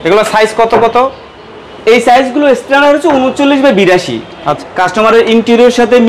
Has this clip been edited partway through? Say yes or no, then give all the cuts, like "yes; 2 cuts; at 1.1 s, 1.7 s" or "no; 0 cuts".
yes; 1 cut; at 4.6 s